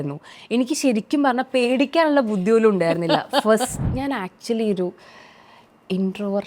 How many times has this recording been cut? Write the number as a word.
one